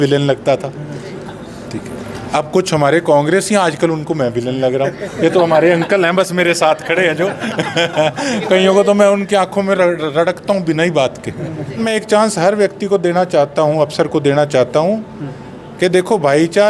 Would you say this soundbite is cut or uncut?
cut